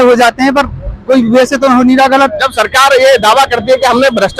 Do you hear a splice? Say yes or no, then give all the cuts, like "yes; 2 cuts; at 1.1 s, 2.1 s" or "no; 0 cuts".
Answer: no; 0 cuts